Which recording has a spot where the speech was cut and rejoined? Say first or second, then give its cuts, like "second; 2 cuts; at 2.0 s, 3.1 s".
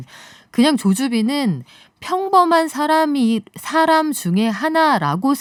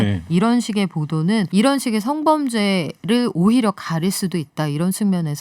second; 1 cut; at 1.5 s